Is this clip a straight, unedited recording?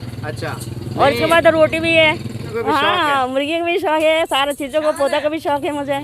no; 1 cut; at 2.5 s

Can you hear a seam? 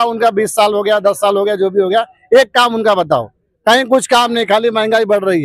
no; 0 cuts

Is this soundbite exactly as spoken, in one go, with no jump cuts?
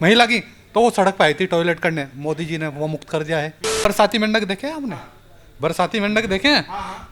no; 1 cut; at 3.6 s

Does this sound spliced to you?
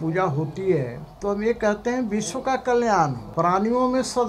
yes; 2 cuts; at 1.0 s, 3.2 s

